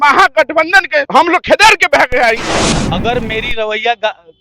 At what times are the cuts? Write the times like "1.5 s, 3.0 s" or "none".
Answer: 1.1 s, 2.5 s